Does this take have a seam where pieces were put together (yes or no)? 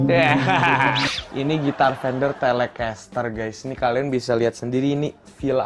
yes